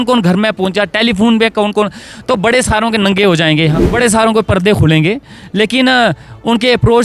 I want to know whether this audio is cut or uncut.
cut